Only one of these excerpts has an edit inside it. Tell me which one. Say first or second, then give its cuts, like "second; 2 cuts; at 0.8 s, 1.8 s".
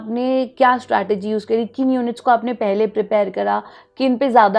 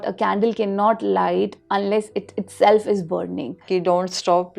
second; 1 cut; at 3.6 s